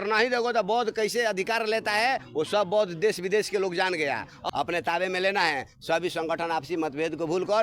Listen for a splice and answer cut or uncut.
cut